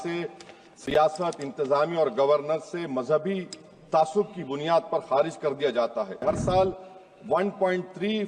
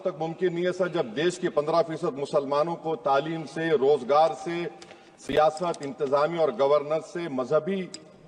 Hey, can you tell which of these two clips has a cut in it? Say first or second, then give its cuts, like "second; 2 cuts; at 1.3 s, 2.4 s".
first; 1 cut; at 6.2 s